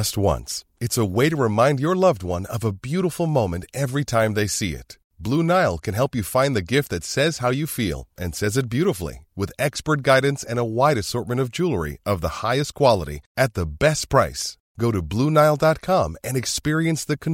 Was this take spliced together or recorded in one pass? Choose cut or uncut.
uncut